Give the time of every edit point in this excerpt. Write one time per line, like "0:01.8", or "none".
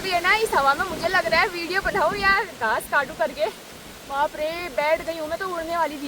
none